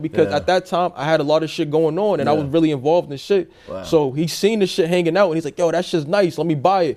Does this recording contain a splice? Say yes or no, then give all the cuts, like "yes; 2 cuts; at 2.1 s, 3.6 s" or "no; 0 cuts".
no; 0 cuts